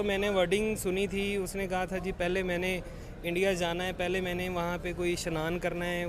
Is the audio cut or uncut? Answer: uncut